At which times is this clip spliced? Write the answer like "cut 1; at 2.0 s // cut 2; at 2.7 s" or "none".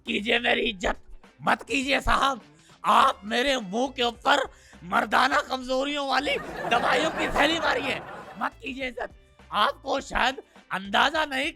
none